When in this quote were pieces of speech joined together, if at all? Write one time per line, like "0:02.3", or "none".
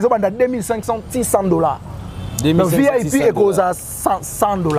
none